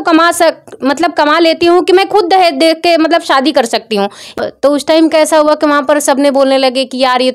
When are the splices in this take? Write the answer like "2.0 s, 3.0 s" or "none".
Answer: 4.4 s